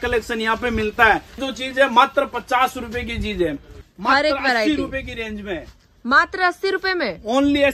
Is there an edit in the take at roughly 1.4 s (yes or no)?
yes